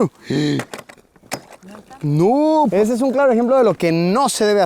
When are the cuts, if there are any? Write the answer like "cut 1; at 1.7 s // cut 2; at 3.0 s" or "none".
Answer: cut 1; at 2.7 s

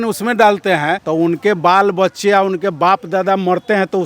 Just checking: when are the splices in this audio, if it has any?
cut 1; at 1.0 s

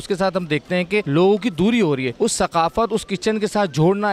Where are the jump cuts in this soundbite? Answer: cut 1; at 1.1 s // cut 2; at 2.1 s

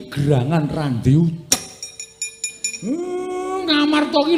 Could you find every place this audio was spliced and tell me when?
none

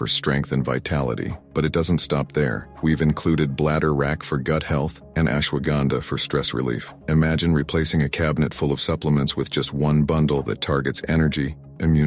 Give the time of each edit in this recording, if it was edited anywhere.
cut 1; at 9.7 s

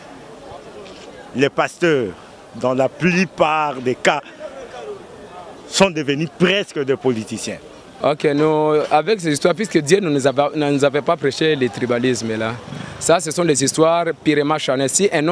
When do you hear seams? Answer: cut 1; at 7.8 s

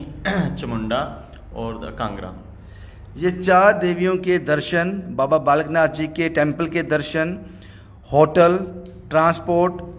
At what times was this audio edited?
none

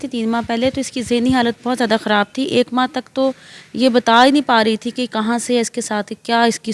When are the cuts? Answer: none

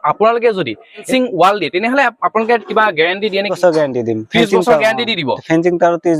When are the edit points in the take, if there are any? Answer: cut 1; at 1.0 s // cut 2; at 3.5 s

